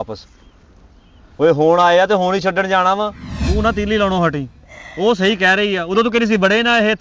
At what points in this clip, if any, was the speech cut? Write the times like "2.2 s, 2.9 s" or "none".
3.3 s